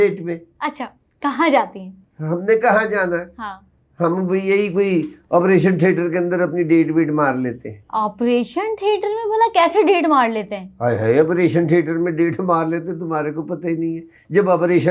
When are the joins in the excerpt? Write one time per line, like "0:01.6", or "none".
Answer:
none